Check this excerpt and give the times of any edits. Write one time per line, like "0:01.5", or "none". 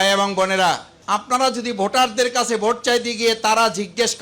0:00.9